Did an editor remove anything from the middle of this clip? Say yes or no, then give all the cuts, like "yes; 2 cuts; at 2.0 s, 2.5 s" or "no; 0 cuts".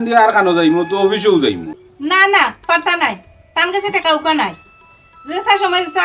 yes; 1 cut; at 1.8 s